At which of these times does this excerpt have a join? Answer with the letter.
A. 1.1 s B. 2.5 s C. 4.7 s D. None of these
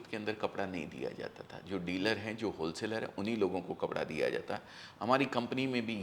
D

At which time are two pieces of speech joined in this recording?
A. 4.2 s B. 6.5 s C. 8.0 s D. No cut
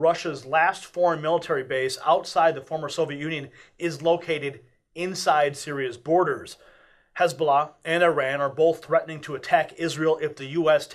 B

